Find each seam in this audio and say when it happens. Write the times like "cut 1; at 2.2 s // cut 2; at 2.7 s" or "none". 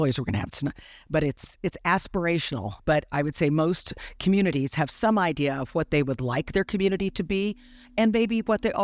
cut 1; at 2.7 s